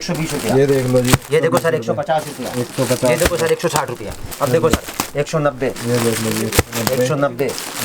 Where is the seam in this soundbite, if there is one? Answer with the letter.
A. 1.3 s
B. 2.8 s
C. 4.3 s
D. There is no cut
C